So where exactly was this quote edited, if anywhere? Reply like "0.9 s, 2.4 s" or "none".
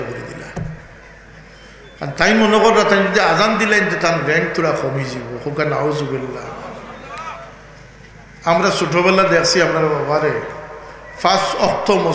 none